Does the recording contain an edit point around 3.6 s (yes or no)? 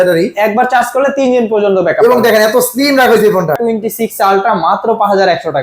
yes